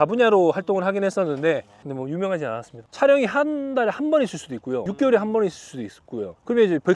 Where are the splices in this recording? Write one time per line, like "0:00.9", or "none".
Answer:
0:02.8
0:04.9